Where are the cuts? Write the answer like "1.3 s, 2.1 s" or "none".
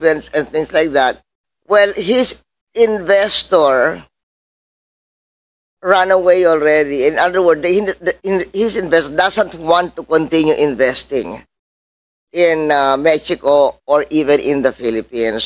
none

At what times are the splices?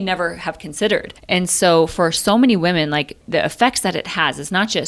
1.2 s, 3.2 s

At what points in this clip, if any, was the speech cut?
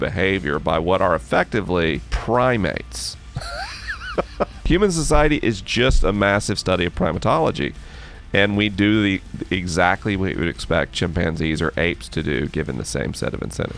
2.1 s, 4.5 s

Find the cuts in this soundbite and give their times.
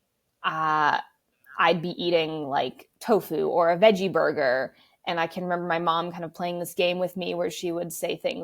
none

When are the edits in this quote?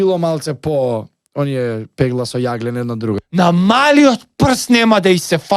3.2 s

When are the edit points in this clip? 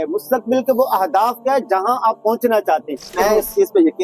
3.1 s

